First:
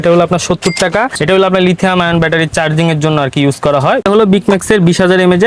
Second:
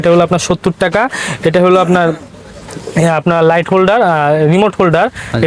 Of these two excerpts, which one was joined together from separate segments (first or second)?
first